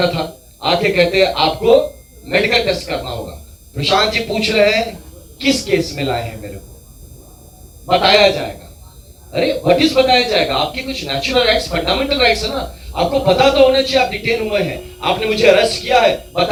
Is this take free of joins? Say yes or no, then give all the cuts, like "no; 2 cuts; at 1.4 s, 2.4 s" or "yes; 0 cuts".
yes; 0 cuts